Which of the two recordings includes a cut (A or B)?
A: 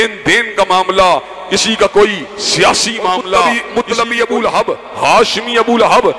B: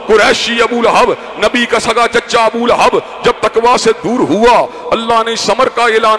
A